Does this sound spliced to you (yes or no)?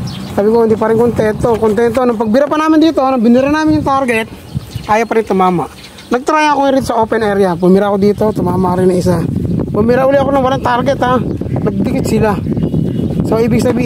no